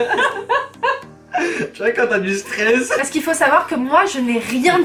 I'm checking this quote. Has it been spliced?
yes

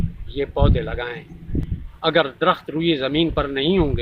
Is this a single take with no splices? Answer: no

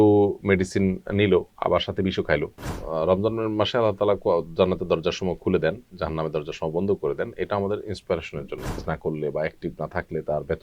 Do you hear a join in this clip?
yes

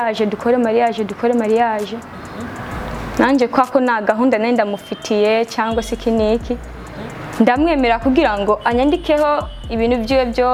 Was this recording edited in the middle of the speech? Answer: no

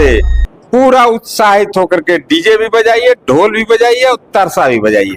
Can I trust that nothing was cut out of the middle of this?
yes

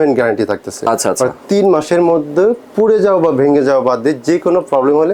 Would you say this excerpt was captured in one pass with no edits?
yes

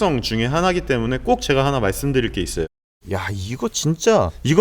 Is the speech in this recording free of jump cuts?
no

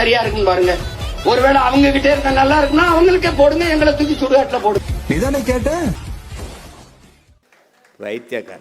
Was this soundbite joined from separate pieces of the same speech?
no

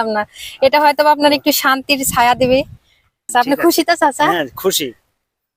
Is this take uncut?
no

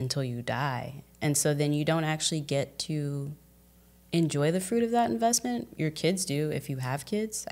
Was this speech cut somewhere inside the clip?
no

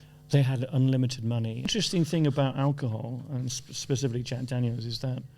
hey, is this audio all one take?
no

